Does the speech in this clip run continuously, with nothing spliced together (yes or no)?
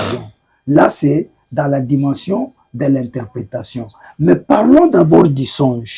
yes